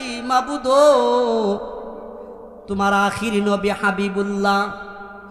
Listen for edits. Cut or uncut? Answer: uncut